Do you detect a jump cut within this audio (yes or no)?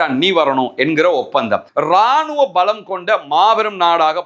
yes